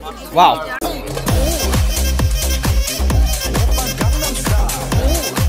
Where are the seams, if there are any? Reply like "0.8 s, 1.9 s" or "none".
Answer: none